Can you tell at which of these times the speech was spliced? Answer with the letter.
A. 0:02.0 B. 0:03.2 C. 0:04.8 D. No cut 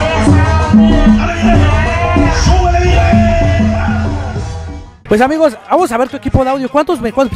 C